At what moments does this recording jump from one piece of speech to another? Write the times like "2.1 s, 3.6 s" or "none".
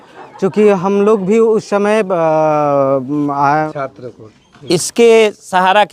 3.7 s